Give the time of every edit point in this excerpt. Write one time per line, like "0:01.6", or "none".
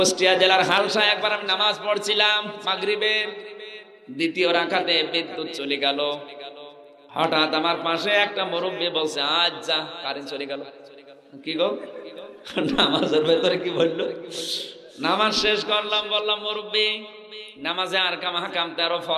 none